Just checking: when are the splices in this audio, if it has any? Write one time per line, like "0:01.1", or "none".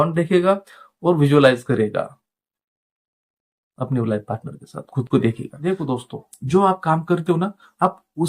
0:05.6